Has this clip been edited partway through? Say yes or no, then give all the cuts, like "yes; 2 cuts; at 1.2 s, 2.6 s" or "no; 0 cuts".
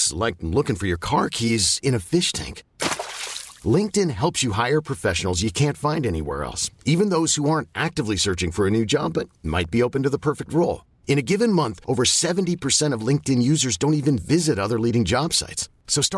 no; 0 cuts